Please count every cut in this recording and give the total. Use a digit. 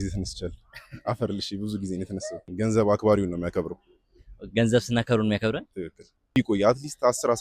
2